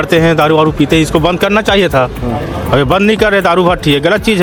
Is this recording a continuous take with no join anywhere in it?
yes; 0 cuts

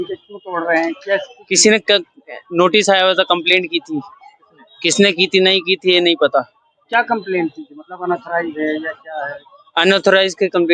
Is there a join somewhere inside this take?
no; 0 cuts

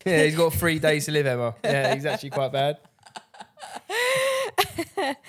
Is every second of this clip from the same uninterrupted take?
yes; 0 cuts

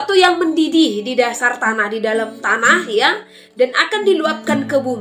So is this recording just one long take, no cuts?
yes; 0 cuts

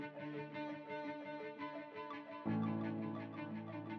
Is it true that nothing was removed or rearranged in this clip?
yes; 0 cuts

